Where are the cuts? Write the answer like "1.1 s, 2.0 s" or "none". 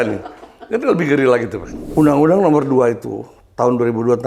1.9 s